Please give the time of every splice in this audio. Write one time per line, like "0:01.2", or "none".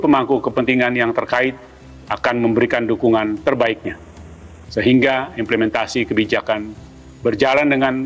none